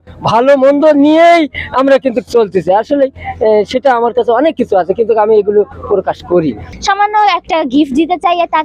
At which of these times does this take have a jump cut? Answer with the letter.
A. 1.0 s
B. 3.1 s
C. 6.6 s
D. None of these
C